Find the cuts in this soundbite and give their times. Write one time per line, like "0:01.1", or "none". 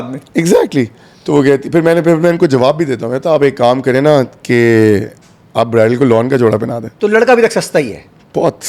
0:06.8